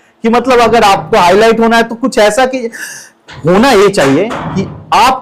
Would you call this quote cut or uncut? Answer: uncut